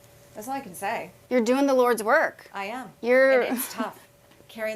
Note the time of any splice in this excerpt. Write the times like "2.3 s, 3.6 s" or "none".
1.1 s